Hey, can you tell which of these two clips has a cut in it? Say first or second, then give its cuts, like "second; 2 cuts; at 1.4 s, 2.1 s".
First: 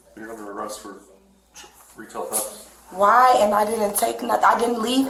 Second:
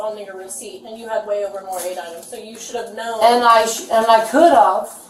second; 1 cut; at 2.2 s